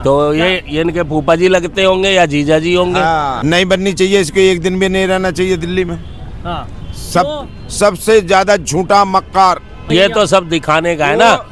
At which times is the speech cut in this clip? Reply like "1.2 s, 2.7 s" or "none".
3.4 s, 9.9 s